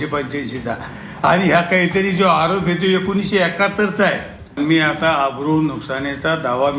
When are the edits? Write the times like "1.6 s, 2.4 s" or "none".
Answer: 4.5 s